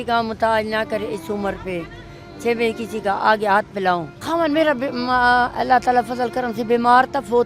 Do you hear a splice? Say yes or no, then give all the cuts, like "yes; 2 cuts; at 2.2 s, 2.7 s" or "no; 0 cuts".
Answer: yes; 1 cut; at 4.1 s